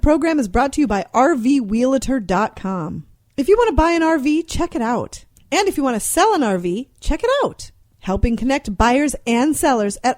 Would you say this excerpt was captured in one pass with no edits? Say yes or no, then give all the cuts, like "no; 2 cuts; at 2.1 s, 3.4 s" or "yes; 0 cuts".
yes; 0 cuts